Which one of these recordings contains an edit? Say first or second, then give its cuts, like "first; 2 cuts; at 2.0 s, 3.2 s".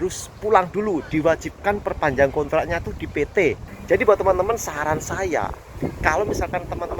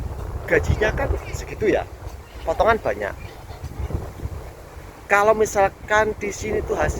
first; 1 cut; at 3.7 s